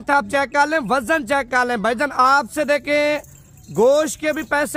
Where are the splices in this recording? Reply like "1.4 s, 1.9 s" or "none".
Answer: none